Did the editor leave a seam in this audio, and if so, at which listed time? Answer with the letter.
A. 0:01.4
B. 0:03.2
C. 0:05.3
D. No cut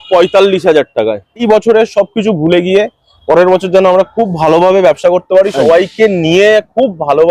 A